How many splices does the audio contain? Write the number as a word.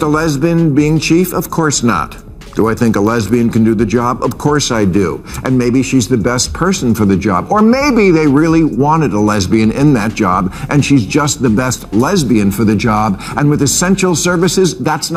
zero